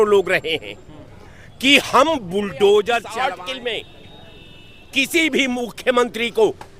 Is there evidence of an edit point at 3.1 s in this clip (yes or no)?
yes